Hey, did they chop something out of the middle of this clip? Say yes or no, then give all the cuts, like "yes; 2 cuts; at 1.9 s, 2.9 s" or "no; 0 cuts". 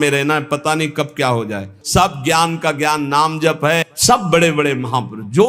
yes; 1 cut; at 1.8 s